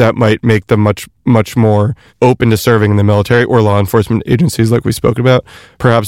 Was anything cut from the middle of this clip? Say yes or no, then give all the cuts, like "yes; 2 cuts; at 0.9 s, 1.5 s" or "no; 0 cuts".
no; 0 cuts